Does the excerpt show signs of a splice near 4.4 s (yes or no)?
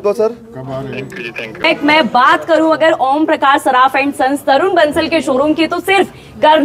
no